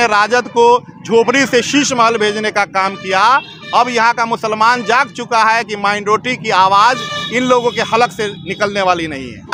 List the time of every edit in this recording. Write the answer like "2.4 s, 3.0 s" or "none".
none